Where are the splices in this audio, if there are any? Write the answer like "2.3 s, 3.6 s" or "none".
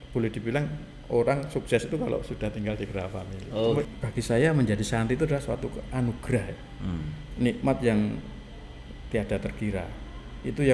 3.9 s